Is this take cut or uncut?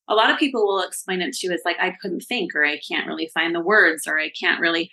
uncut